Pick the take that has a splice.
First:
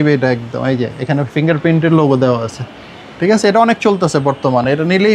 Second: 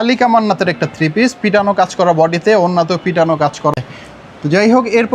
second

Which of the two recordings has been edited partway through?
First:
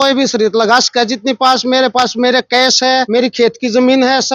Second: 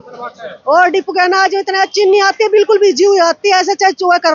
first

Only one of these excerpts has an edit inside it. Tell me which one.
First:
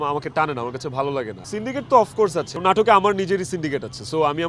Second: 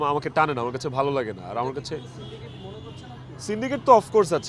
first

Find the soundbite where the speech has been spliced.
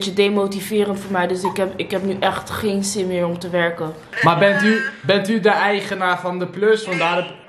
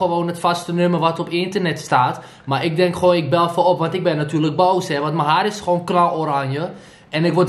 first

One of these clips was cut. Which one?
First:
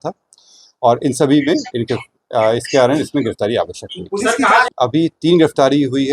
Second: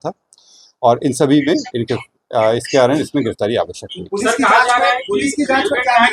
first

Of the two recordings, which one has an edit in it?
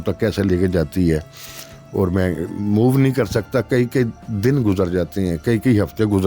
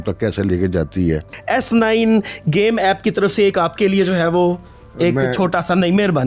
second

